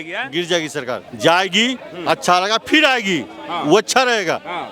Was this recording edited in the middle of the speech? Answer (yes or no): yes